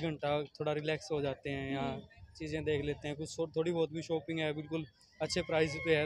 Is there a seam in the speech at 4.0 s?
no; 0 cuts

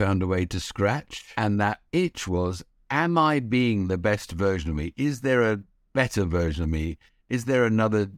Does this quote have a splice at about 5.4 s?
no; 1 cut; at 1.2 s

